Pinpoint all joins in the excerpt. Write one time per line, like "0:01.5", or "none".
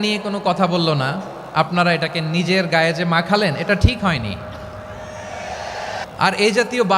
0:06.1